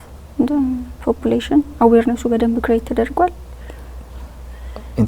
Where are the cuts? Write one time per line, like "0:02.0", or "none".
none